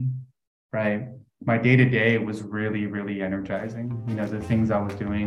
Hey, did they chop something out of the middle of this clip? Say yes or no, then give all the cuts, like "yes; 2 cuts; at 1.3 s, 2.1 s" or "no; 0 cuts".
no; 0 cuts